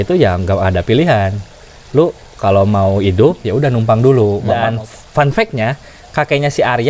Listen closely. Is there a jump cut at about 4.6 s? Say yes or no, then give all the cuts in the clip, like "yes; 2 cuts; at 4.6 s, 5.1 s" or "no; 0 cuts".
yes; 1 cut; at 4.6 s